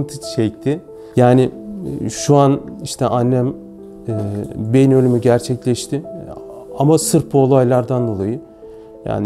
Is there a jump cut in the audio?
yes; 1 cut; at 1.0 s

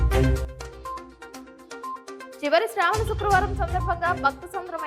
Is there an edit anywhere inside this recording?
yes; 1 cut; at 1.1 s

